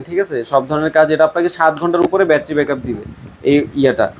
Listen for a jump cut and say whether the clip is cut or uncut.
uncut